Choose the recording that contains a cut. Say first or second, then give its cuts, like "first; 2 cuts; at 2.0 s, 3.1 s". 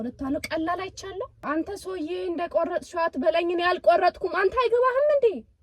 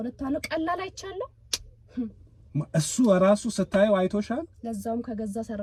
first; 1 cut; at 1.4 s